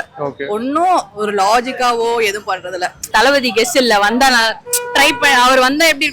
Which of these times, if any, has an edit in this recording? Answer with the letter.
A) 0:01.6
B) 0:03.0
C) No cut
B